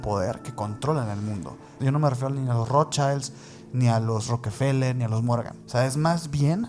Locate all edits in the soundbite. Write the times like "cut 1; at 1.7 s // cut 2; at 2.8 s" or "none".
cut 1; at 1.7 s // cut 2; at 5.6 s